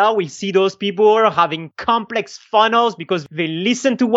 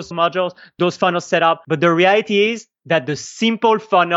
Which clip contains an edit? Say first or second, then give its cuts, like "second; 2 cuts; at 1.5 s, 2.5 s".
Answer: second; 1 cut; at 1.6 s